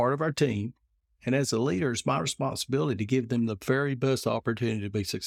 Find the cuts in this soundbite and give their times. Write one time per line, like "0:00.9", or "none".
none